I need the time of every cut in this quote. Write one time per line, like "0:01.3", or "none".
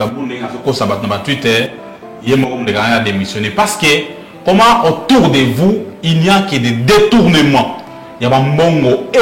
none

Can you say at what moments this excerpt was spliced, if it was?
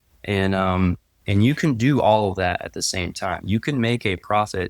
0:01.3

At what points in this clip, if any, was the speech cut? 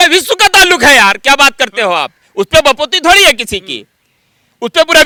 none

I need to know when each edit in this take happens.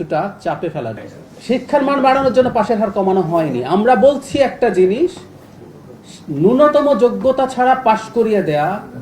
0:01.0

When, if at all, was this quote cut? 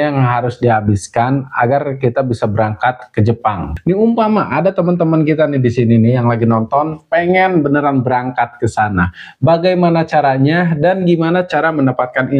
0:03.7

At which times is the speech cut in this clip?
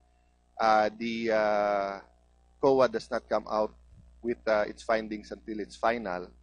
0:03.5

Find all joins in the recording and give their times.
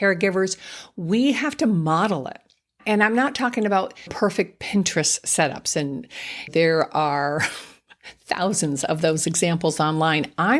0:02.7
0:04.1
0:06.5

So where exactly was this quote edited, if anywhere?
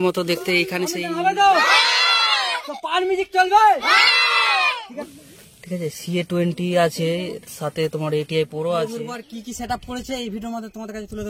0:00.9
0:05.1
0:09.2

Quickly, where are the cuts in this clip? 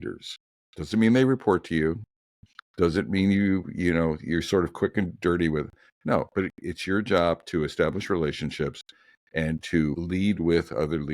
0:10.0

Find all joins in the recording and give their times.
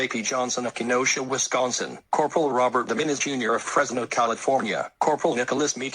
0:04.9

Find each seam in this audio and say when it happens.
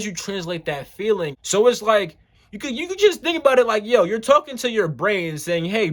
0:01.4

